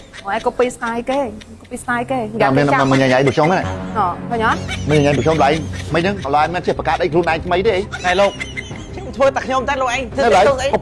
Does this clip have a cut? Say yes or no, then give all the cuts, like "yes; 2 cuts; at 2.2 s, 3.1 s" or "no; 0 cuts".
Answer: no; 0 cuts